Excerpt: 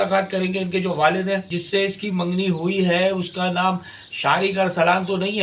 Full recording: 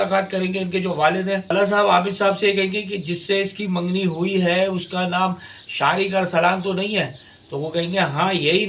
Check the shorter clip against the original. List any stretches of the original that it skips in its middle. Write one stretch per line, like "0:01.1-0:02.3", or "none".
0:01.4-0:03.0